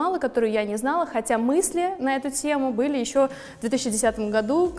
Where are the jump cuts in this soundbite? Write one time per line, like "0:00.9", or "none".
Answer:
none